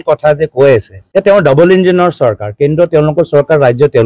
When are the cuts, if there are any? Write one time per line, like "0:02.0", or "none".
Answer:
0:01.0